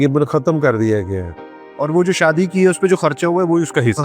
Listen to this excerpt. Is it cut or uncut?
cut